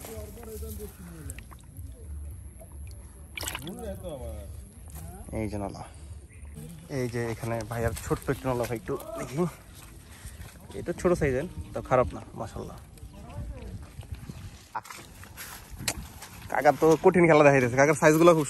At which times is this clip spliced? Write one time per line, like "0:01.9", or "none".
0:06.6
0:14.8